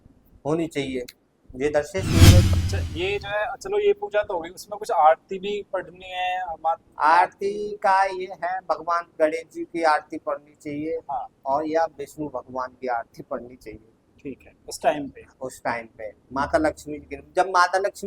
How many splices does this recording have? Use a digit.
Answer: 1